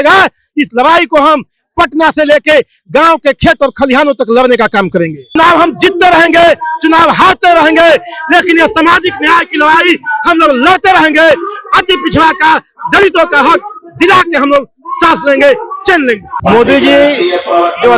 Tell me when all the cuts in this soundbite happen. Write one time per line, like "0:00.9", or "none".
0:05.4
0:16.3